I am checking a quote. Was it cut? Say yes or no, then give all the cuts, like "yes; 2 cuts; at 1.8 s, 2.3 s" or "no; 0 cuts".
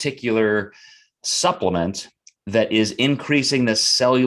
no; 0 cuts